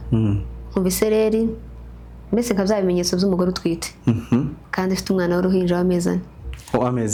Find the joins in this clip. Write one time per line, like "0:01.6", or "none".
none